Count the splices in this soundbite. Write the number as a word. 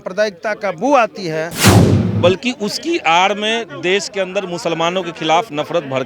one